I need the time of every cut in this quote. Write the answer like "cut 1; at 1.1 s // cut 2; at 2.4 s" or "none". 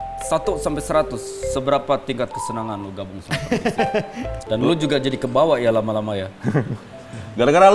cut 1; at 4.4 s

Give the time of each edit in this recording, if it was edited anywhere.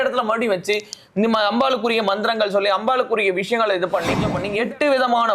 cut 1; at 4.3 s

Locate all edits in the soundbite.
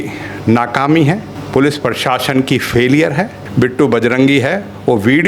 cut 1; at 1.3 s // cut 2; at 3.4 s

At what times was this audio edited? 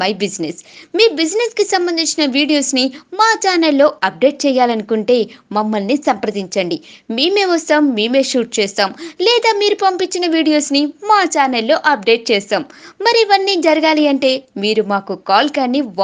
none

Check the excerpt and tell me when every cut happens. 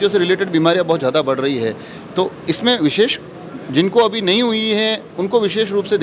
none

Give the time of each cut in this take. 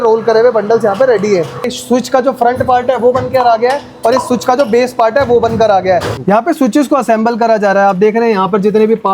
cut 1; at 1.6 s // cut 2; at 6.1 s

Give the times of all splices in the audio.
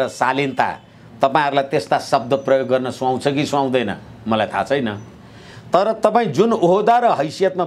none

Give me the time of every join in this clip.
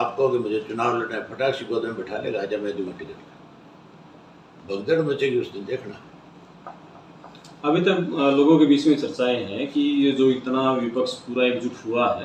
none

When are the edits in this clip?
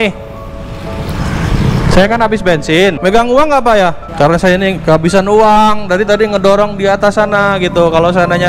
cut 1; at 3.0 s // cut 2; at 4.0 s

